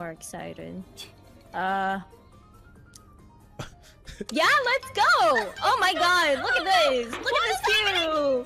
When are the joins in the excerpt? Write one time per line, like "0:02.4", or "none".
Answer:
none

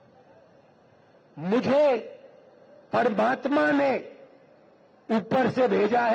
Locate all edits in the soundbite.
none

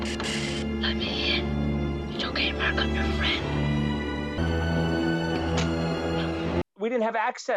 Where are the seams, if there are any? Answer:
0:04.4
0:06.6

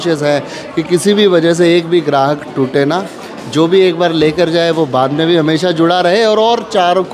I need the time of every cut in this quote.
none

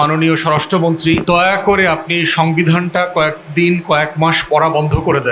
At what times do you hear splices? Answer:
0:01.2

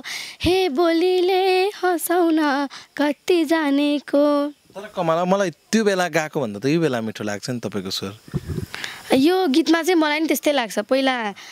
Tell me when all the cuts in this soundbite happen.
none

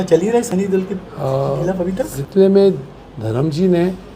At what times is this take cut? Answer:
0:02.1

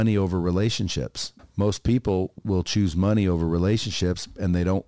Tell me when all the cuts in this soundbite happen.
0:01.3
0:02.4

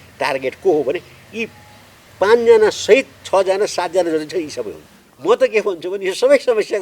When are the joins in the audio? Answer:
0:05.1

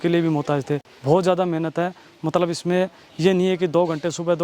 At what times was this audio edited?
0:00.9

